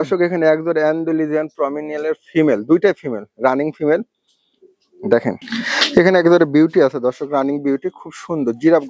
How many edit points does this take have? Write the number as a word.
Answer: one